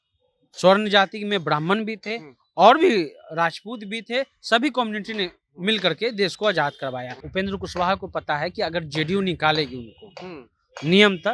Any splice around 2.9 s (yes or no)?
no